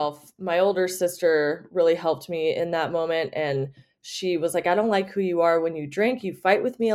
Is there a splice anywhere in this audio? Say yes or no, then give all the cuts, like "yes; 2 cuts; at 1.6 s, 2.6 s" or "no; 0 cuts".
no; 0 cuts